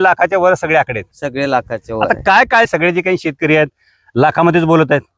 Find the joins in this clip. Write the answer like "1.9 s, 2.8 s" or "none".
2.7 s